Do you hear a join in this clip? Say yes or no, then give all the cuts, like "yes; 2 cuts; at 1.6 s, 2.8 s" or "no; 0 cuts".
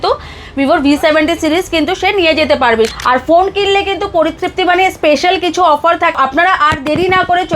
yes; 2 cuts; at 2.9 s, 6.2 s